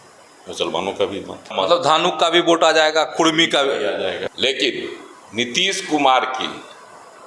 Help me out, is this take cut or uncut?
cut